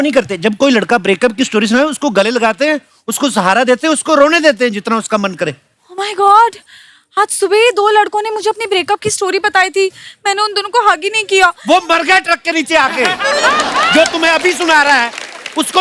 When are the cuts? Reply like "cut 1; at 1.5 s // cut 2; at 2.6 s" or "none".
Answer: none